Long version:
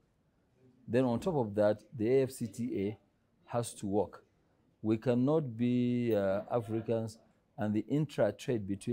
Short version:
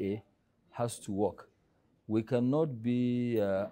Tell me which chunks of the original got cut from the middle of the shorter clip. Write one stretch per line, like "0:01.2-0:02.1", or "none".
none

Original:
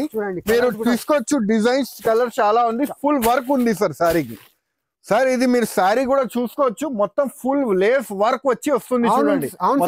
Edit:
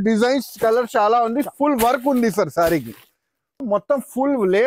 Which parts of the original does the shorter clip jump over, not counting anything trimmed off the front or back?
0:05.0-0:06.8

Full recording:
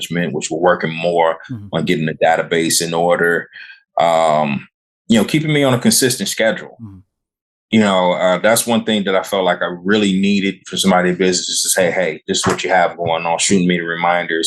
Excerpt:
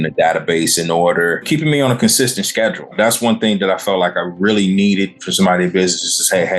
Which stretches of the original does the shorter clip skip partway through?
0:03.5-0:05.3
0:06.8-0:08.4

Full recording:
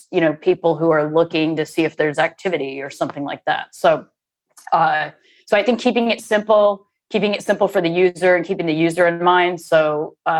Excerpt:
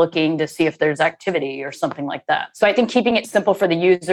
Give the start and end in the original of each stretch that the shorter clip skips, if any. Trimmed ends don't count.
0:03.7-0:05.4
0:06.1-0:07.4

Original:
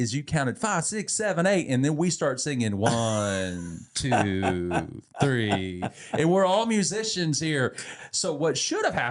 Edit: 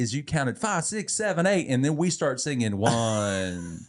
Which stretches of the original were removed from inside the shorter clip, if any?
none

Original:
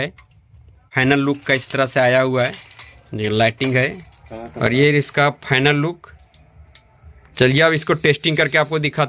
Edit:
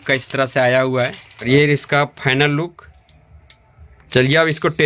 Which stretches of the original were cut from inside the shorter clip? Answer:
0:02.8-0:04.7

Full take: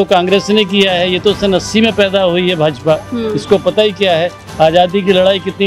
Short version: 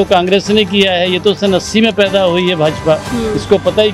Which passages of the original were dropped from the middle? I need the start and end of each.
none

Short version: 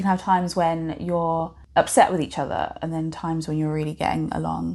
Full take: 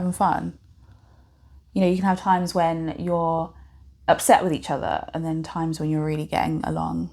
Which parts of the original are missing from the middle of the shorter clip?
0:03.6-0:03.9

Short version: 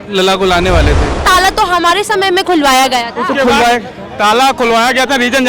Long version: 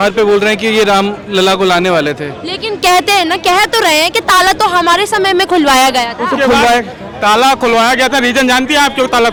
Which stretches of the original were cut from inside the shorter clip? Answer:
0:02.4-0:04.2

